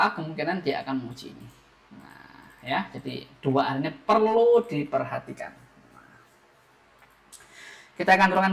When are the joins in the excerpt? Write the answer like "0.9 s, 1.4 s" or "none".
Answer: none